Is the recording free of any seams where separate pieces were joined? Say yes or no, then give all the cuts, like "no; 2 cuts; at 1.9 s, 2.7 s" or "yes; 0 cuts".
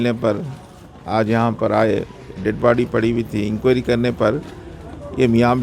yes; 0 cuts